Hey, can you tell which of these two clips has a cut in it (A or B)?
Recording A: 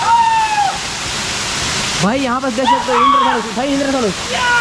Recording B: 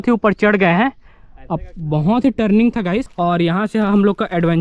B